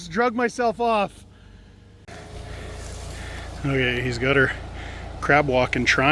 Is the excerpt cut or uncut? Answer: cut